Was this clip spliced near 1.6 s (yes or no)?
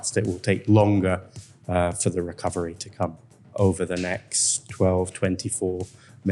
no